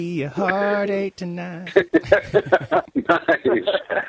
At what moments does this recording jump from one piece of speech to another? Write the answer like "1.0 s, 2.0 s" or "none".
1.6 s, 2.9 s